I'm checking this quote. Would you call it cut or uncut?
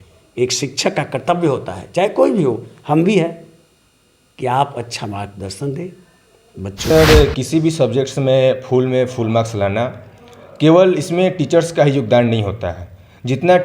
cut